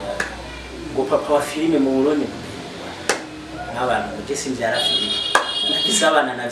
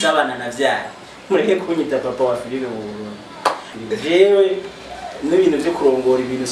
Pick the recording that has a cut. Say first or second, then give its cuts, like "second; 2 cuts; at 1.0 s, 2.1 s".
second; 1 cut; at 3.7 s